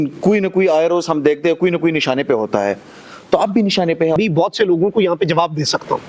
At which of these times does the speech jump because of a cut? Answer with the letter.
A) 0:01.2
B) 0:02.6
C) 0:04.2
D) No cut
C